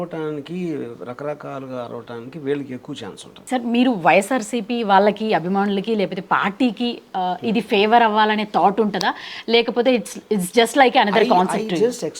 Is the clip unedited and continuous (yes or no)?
no